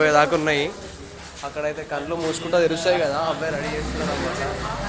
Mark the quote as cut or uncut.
uncut